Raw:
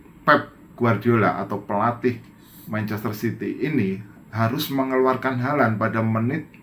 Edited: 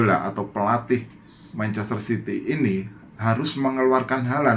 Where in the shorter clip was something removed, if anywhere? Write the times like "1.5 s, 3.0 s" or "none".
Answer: none